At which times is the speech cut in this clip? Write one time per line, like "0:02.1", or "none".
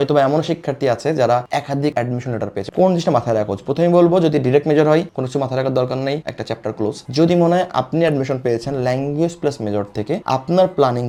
none